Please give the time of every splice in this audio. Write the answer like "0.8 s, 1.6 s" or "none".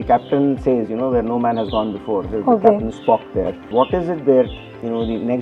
3.6 s